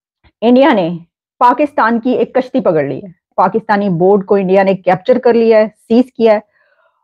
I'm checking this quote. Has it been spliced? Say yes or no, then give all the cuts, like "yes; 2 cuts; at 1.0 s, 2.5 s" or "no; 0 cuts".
yes; 1 cut; at 3.3 s